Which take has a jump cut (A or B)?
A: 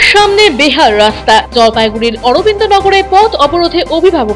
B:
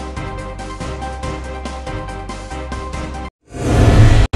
B